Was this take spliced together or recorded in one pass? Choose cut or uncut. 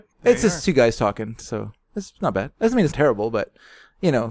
cut